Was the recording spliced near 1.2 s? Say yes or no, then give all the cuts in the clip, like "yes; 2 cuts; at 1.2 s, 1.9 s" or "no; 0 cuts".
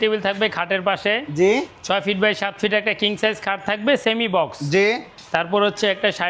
no; 0 cuts